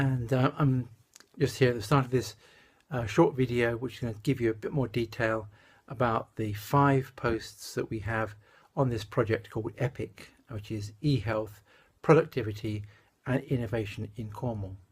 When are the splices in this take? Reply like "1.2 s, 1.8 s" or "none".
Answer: 11.3 s